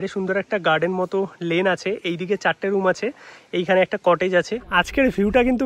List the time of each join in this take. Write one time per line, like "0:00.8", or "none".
0:04.6